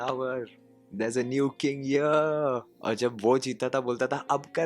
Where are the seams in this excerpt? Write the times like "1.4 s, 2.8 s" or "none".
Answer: 2.7 s